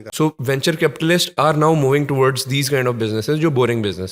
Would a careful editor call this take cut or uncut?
uncut